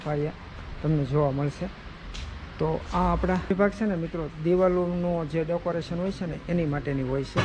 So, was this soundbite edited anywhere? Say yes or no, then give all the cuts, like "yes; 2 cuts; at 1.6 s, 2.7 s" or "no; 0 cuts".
yes; 1 cut; at 3.5 s